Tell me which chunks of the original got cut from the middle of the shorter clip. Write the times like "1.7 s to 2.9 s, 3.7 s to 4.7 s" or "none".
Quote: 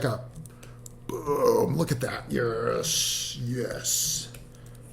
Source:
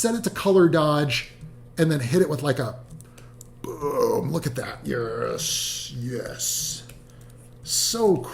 none